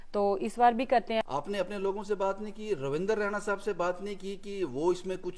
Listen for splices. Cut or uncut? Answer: cut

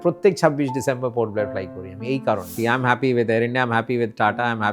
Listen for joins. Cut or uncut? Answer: cut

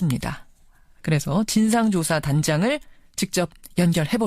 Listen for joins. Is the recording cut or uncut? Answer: cut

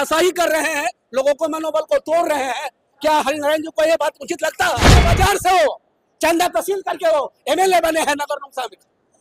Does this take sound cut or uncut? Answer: cut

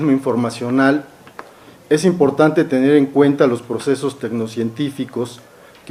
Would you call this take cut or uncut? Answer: uncut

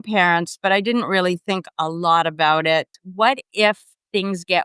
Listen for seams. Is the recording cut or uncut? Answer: cut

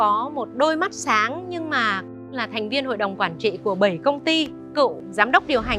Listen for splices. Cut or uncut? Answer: cut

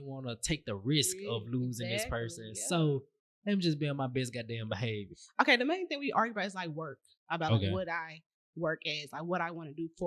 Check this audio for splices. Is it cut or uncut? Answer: cut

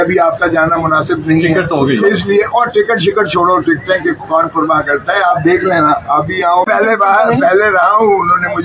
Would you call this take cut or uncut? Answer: uncut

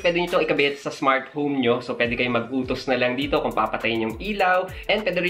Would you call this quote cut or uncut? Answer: uncut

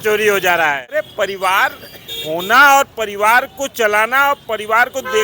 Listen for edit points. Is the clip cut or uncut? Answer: cut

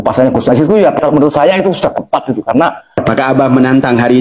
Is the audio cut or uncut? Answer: cut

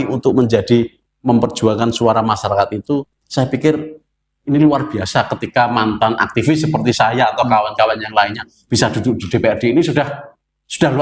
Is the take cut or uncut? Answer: uncut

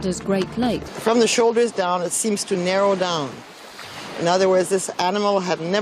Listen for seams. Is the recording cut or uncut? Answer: uncut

